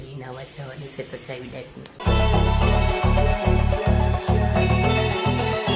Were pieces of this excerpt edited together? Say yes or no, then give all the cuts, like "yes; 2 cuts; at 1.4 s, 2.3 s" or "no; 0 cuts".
no; 0 cuts